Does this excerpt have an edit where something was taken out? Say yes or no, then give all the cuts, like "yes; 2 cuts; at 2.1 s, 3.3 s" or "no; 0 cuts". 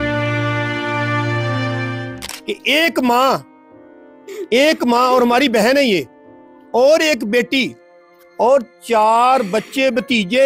no; 0 cuts